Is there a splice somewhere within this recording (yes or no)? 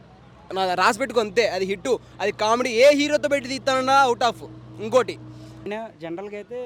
yes